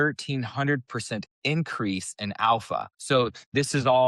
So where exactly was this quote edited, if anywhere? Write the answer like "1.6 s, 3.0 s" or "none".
2.9 s